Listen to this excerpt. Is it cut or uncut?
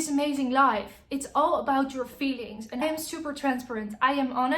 cut